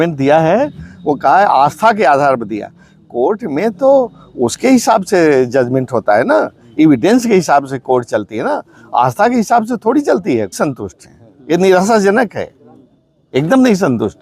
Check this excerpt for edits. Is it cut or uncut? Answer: cut